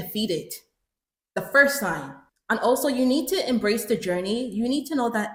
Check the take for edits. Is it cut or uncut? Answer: uncut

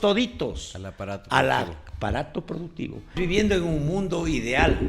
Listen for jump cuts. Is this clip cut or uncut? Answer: cut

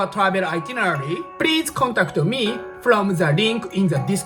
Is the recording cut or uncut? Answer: uncut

